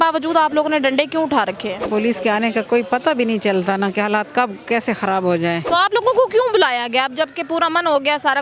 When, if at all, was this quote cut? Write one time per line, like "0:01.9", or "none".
0:01.8
0:05.6